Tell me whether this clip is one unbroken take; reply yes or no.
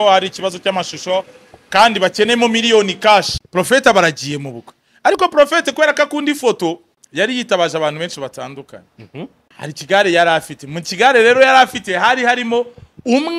no